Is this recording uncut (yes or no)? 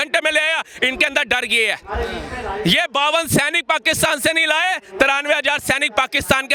yes